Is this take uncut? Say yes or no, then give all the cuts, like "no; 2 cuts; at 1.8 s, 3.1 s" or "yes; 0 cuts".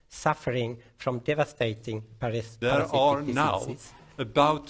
no; 1 cut; at 2.5 s